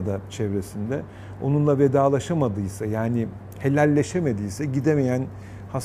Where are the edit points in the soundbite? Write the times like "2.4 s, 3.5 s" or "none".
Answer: none

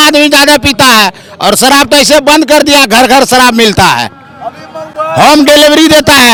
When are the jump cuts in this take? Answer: none

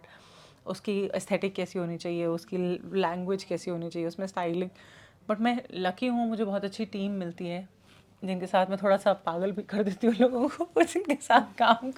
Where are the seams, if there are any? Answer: none

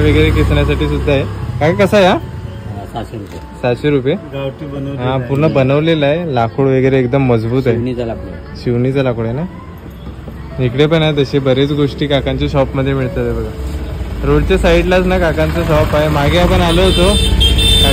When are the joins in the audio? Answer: none

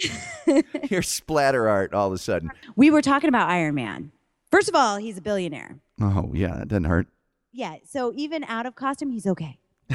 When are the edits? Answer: 2.6 s

